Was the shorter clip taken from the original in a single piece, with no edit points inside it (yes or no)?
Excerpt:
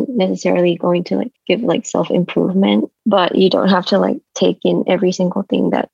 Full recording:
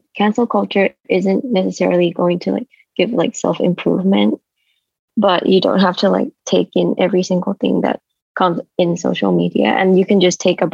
no